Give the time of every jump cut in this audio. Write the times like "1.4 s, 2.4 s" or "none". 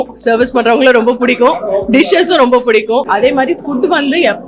3.0 s